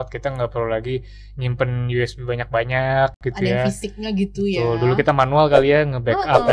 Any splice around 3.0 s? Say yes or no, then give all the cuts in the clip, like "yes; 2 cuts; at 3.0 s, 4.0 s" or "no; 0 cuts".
no; 0 cuts